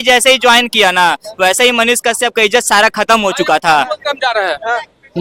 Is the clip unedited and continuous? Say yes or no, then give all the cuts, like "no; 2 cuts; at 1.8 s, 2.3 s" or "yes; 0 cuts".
yes; 0 cuts